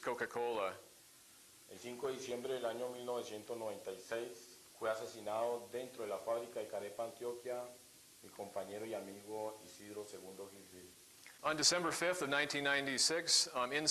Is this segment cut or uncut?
cut